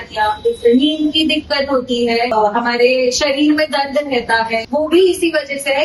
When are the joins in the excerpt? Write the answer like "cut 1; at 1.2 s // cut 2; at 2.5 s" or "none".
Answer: cut 1; at 2.5 s // cut 2; at 4.6 s